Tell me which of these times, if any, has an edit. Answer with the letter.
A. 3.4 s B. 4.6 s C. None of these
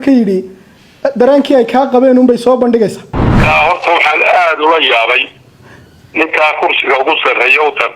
A